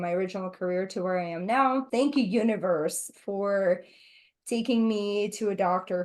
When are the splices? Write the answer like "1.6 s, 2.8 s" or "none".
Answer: 1.9 s